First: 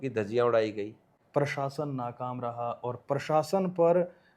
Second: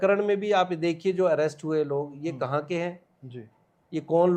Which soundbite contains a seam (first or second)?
first